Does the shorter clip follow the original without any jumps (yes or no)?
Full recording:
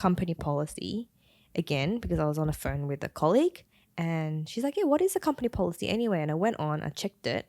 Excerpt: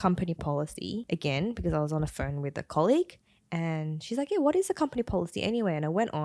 no